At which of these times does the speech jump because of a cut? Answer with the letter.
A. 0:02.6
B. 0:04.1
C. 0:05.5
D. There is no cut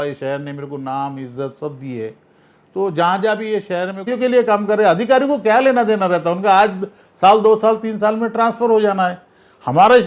B